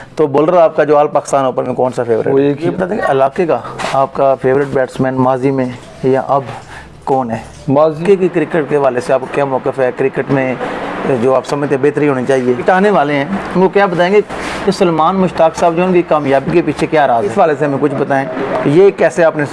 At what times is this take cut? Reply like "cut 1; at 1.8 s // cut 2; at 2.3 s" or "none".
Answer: cut 1; at 2.6 s // cut 2; at 8.0 s // cut 3; at 12.6 s // cut 4; at 17.3 s